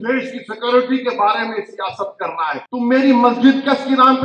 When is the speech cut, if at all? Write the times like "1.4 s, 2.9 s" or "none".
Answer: 2.6 s